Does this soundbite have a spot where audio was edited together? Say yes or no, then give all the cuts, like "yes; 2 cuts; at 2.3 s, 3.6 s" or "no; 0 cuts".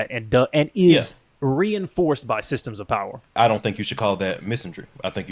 yes; 2 cuts; at 1.2 s, 3.4 s